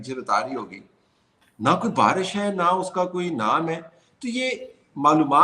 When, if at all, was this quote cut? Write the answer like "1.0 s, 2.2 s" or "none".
none